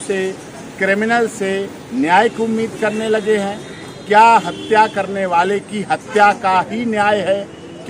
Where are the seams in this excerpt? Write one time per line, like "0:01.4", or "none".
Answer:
none